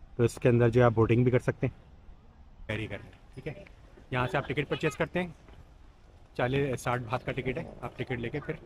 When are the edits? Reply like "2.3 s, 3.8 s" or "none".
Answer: 2.7 s

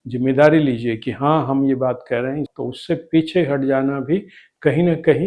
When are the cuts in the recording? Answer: 2.5 s

